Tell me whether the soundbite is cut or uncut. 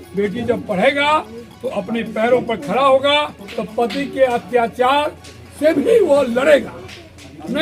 uncut